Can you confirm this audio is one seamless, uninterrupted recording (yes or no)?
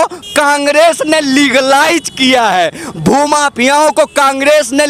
yes